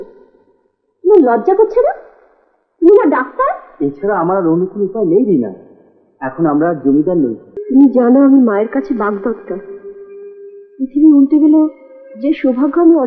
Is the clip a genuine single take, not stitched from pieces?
no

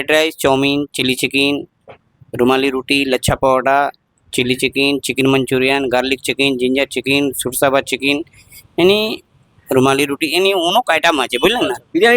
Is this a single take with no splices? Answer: yes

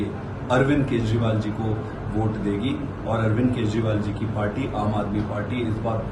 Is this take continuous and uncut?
yes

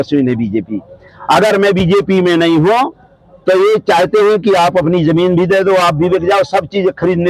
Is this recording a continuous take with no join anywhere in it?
yes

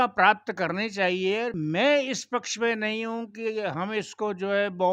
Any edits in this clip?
yes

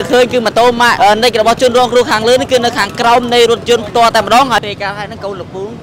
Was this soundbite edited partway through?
yes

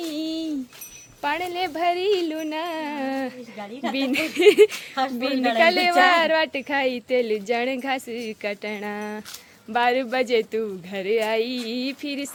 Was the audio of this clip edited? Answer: no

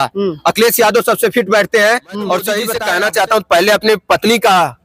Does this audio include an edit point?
yes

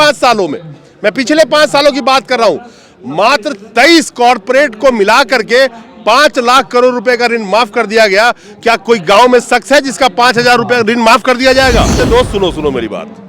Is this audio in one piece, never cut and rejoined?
no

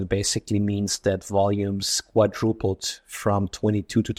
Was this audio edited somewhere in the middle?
no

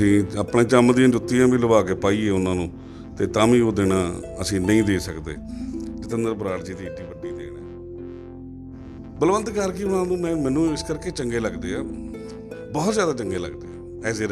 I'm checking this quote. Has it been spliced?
yes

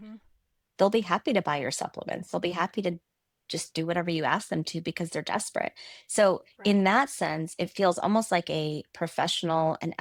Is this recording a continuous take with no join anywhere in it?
yes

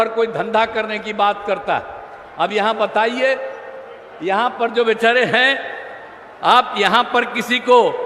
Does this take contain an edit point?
no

